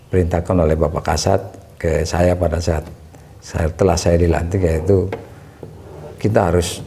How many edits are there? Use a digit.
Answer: 0